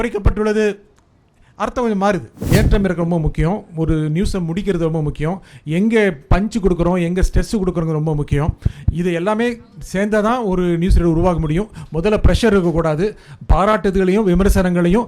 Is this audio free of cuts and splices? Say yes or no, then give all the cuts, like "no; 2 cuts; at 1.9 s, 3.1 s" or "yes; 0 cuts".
no; 1 cut; at 2.4 s